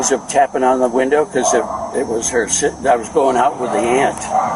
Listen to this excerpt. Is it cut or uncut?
uncut